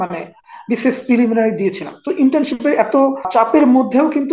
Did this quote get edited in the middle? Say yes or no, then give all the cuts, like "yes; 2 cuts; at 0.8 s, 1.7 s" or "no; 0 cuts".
yes; 1 cut; at 3.3 s